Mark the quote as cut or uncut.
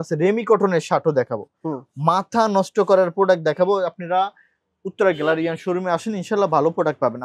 uncut